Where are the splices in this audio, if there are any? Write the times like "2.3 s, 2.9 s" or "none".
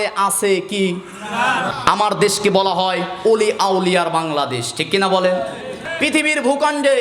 1.7 s, 5.8 s